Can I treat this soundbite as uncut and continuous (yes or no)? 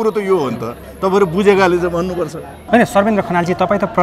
no